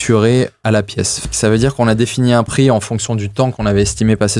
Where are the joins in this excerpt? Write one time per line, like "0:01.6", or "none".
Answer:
0:01.3